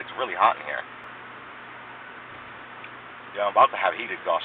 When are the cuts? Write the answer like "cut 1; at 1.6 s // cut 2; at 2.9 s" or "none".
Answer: cut 1; at 1.0 s

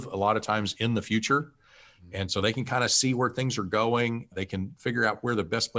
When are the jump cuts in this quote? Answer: cut 1; at 4.3 s

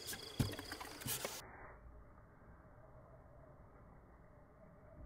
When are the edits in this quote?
cut 1; at 1.3 s

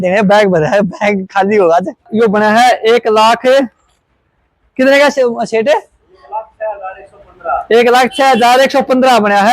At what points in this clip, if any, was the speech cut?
cut 1; at 2.0 s

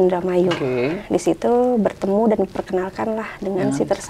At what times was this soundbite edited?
none

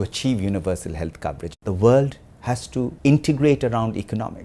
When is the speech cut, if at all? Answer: cut 1; at 1.4 s // cut 2; at 2.9 s

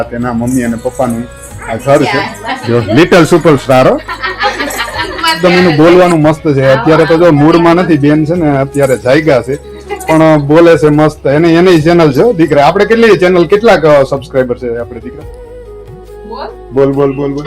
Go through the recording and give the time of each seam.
cut 1; at 2.3 s // cut 2; at 5.4 s

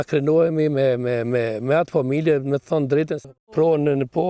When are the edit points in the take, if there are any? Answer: cut 1; at 3.2 s

